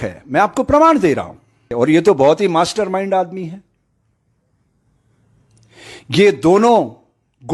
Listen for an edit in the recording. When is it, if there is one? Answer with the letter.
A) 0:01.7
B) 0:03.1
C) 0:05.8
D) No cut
A